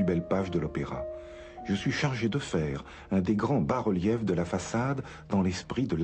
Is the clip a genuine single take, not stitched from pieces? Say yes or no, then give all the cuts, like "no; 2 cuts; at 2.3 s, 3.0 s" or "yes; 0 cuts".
yes; 0 cuts